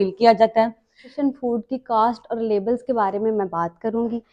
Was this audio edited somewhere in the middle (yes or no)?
yes